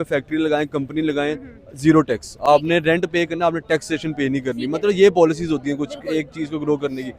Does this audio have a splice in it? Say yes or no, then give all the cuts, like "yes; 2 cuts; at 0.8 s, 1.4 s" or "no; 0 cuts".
no; 0 cuts